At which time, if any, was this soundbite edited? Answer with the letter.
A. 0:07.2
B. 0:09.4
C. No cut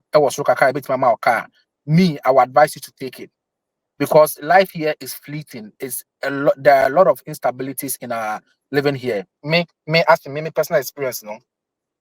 B